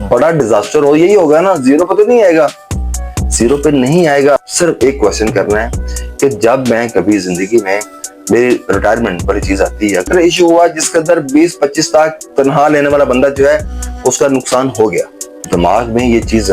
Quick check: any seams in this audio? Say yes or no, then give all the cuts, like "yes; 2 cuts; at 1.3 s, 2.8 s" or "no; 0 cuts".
yes; 3 cuts; at 4.4 s, 10.1 s, 15.3 s